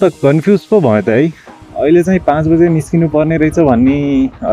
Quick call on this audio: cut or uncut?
cut